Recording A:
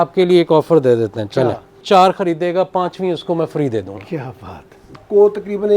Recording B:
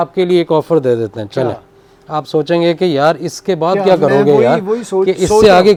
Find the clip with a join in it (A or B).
A